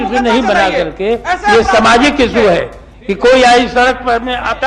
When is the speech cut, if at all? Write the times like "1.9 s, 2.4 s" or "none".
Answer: none